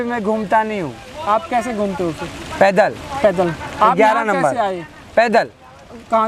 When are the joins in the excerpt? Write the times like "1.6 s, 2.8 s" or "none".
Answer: none